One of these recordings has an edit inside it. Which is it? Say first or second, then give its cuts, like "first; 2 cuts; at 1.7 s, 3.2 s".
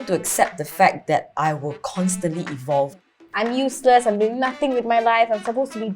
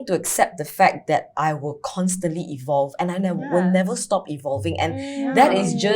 first; 1 cut; at 3.0 s